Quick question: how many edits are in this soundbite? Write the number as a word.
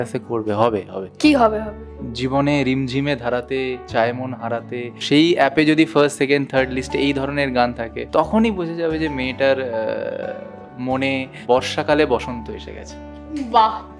four